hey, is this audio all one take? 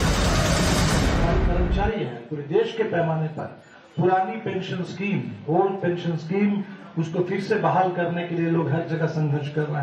yes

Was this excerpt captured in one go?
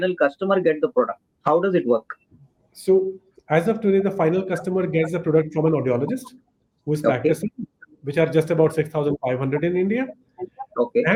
yes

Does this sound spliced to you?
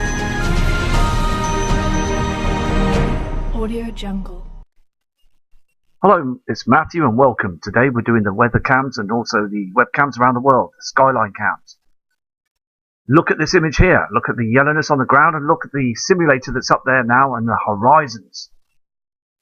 no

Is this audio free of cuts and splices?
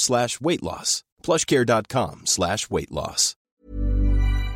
no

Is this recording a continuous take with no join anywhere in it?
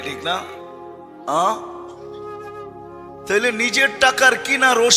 yes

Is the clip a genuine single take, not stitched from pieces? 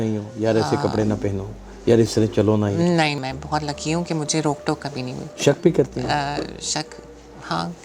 no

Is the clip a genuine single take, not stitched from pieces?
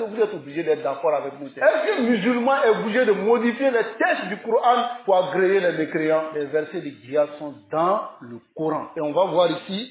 no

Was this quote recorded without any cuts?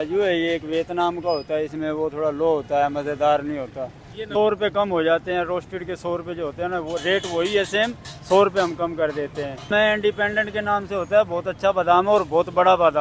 no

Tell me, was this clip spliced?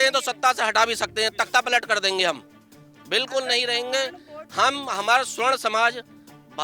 no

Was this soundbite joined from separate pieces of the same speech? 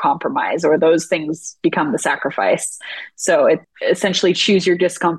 yes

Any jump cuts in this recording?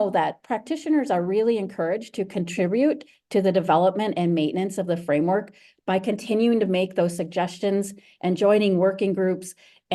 no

